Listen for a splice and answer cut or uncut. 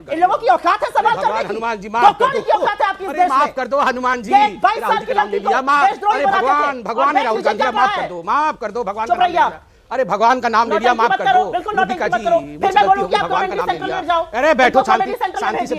uncut